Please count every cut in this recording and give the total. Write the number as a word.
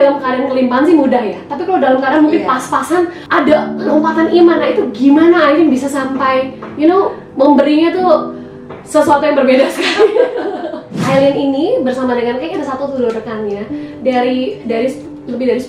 two